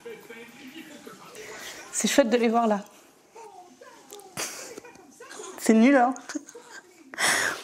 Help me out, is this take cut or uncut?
cut